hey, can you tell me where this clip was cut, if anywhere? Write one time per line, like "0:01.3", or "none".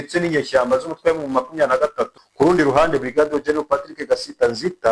0:02.2